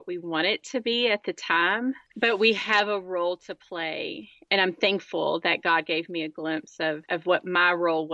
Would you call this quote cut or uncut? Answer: uncut